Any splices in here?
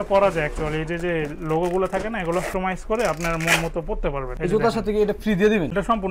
no; 0 cuts

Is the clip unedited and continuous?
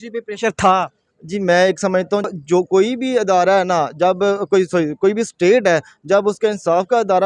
no; 1 cut; at 2.3 s

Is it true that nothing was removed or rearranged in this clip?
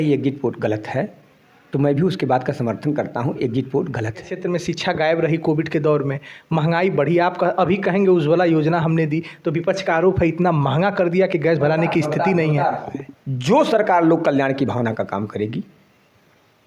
no; 2 cuts; at 4.3 s, 12.9 s

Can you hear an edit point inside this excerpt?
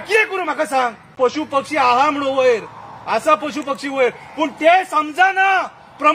yes; 1 cut; at 1.1 s

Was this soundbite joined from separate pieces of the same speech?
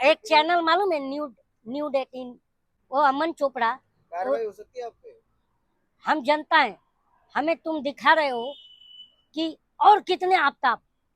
yes; 1 cut; at 2.7 s

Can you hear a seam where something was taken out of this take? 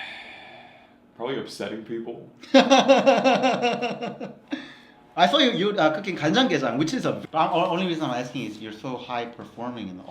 yes; 1 cut; at 7.2 s

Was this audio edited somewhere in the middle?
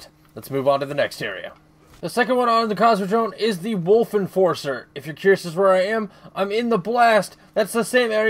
yes; 1 cut; at 5.6 s

